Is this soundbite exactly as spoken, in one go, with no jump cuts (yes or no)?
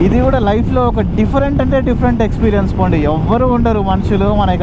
yes